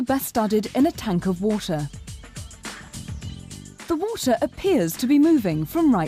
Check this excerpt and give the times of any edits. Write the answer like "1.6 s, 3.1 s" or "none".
1.1 s

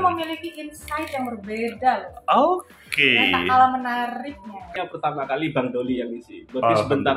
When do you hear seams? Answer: 4.8 s

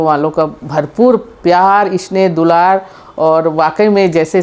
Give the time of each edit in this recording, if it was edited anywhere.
none

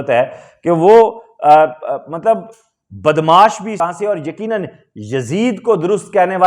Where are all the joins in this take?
3.8 s

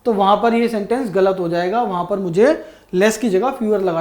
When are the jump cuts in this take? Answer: none

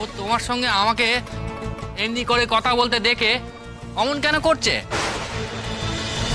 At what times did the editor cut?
none

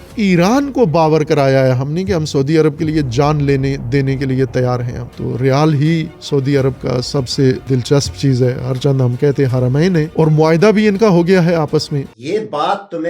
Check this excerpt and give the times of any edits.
5.0 s, 12.0 s

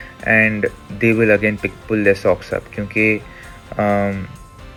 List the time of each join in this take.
none

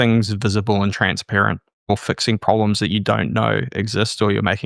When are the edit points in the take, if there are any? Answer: 1.9 s

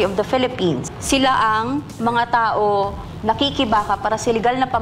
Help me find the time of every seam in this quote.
0.9 s, 3.0 s

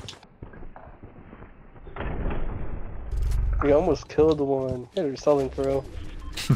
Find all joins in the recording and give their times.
3.5 s

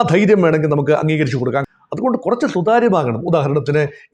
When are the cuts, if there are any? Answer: 1.6 s

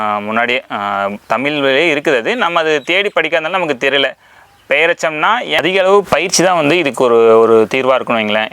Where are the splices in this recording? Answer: 5.5 s

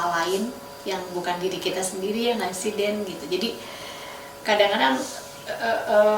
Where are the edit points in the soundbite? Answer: none

